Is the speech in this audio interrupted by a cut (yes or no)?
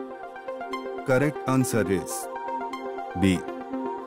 no